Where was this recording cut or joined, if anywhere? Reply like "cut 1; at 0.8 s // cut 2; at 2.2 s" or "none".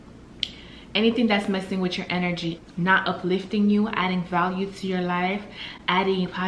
cut 1; at 2.6 s